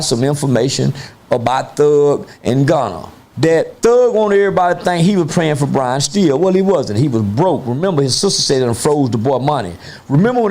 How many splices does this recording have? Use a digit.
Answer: 1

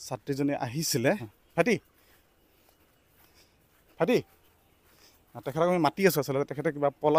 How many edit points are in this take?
1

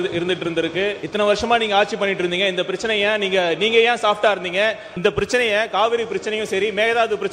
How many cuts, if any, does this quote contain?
2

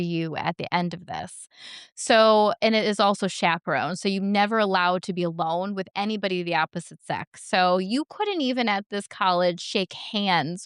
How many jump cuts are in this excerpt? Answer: 0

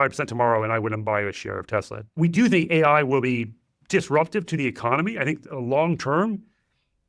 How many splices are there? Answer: 1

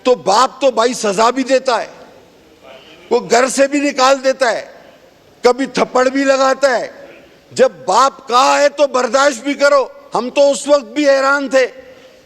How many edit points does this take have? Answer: 0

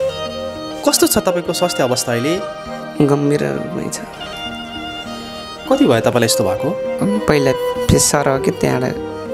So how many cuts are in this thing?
0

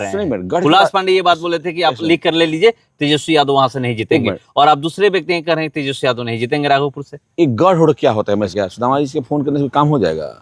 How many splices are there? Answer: 1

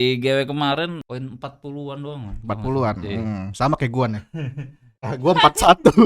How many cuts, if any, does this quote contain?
1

